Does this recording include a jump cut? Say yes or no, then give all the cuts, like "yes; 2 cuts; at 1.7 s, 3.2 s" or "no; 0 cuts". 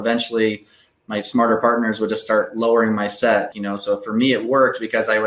yes; 1 cut; at 3.5 s